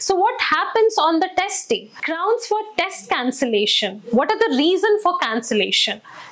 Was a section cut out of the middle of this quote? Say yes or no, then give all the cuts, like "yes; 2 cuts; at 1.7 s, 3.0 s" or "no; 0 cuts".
yes; 1 cut; at 2.0 s